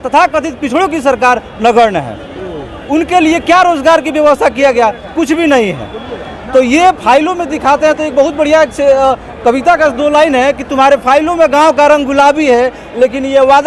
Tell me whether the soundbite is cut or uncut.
uncut